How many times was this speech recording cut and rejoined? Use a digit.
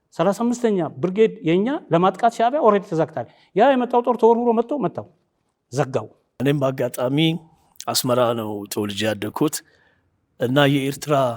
1